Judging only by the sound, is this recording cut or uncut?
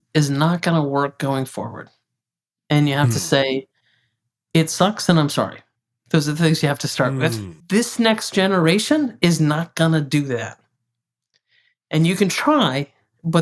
cut